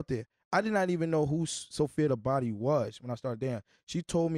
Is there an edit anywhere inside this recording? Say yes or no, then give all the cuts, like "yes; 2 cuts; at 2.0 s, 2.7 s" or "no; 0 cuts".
no; 0 cuts